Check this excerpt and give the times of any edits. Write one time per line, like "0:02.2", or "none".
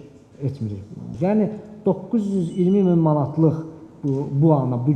0:01.1